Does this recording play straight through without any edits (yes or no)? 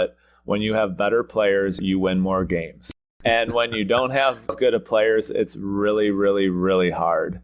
no